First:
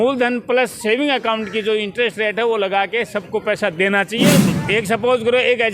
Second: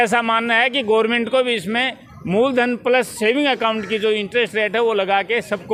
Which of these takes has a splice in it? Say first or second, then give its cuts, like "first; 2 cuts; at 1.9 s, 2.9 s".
first; 1 cut; at 4.4 s